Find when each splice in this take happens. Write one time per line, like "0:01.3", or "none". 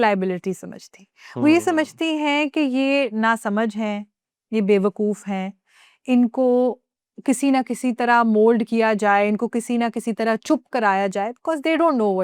none